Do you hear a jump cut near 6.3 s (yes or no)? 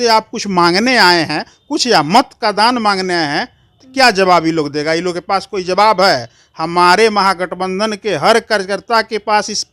no